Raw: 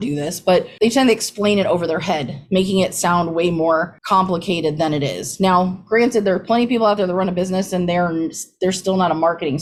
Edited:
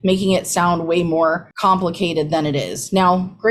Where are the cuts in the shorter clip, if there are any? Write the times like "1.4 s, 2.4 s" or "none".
none